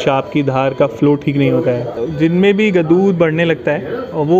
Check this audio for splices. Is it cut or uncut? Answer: cut